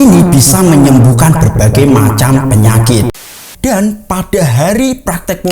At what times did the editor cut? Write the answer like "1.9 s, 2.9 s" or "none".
3.1 s

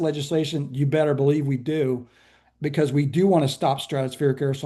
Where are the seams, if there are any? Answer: none

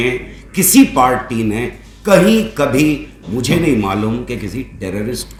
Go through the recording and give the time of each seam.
none

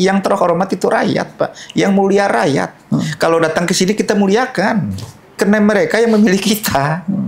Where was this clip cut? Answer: 5.4 s

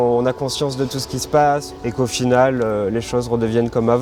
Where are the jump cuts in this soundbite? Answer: none

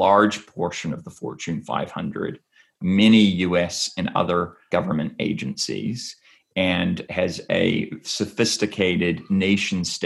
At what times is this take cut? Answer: 4.7 s, 7.0 s

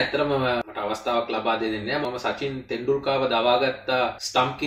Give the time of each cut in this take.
2.0 s

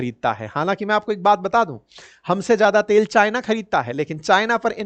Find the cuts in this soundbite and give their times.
none

